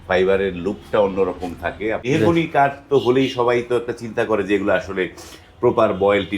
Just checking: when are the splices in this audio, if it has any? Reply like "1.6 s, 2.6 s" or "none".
2.0 s